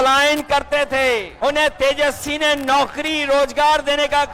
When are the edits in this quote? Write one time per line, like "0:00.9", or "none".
0:01.3